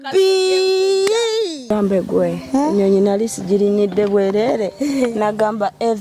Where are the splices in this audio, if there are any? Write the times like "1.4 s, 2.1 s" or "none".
1.7 s

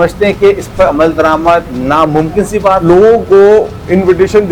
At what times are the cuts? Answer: 1.7 s, 2.8 s

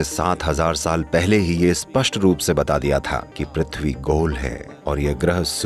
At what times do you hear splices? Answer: none

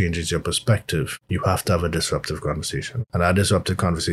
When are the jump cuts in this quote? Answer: 1.1 s, 2.9 s

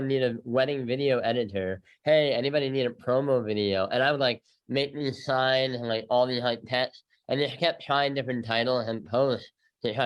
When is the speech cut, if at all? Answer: none

